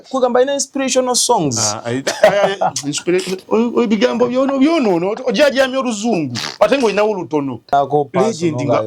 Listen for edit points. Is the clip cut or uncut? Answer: cut